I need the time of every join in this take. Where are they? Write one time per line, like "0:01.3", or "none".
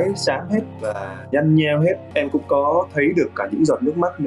0:02.0